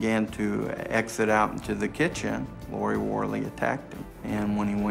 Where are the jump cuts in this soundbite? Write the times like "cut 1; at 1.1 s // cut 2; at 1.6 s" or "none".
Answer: none